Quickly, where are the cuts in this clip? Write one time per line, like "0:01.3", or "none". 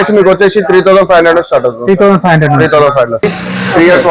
0:03.2